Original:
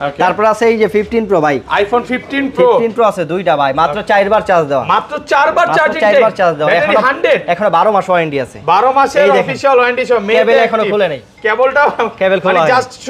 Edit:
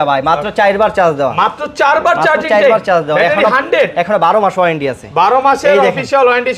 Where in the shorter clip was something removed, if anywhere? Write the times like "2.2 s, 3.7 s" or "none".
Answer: none